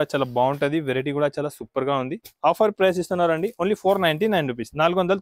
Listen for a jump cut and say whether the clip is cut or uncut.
uncut